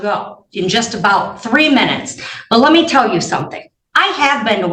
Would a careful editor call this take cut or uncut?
uncut